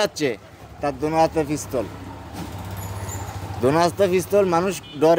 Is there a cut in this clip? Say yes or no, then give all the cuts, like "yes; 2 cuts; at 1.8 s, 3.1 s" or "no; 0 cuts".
no; 0 cuts